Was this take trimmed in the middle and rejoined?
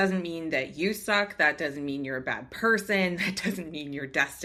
no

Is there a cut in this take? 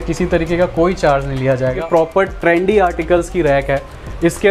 yes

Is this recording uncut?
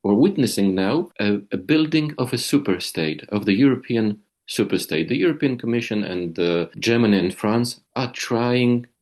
no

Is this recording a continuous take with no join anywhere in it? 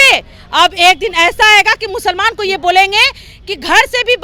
yes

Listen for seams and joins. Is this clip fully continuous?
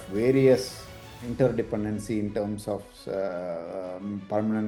yes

